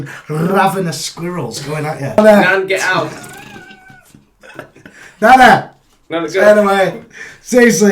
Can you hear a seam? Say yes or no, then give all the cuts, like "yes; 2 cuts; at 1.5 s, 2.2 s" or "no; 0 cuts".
yes; 1 cut; at 2.2 s